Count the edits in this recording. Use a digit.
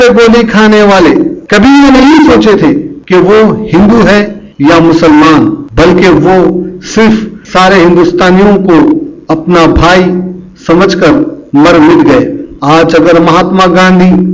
1